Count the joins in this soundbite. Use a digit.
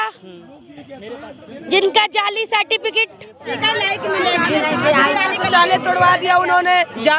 1